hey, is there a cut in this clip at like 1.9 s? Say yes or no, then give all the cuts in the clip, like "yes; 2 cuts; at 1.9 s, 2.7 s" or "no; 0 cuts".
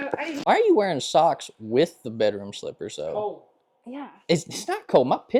no; 0 cuts